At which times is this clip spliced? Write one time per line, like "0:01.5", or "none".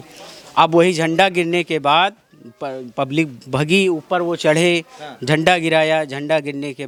none